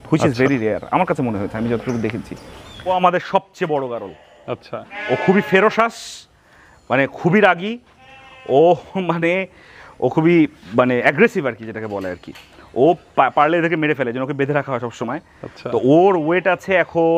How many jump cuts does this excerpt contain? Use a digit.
1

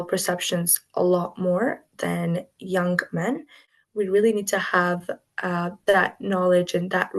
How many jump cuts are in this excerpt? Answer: 1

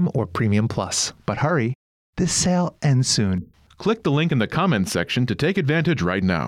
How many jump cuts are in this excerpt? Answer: 1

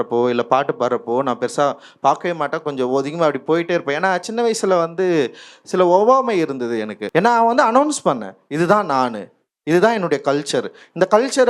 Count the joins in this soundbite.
1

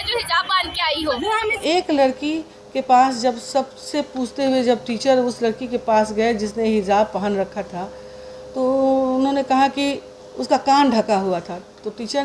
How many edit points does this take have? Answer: 1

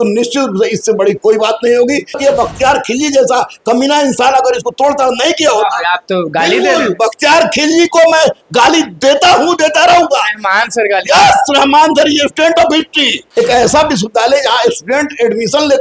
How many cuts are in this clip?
2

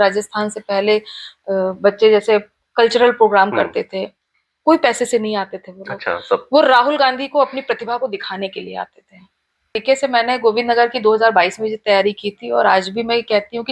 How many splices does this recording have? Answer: 1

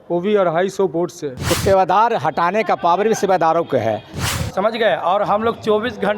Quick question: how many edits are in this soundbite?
2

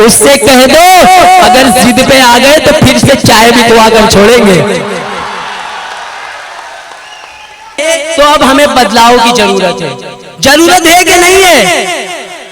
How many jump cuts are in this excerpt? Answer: 1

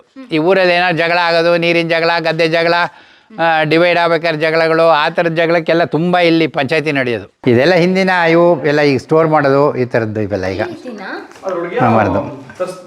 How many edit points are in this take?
1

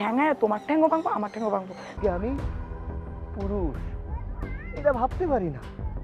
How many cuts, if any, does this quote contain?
1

